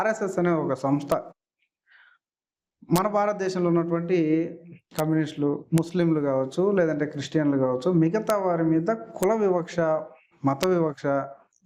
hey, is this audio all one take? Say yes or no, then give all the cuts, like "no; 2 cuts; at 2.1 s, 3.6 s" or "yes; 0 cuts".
yes; 0 cuts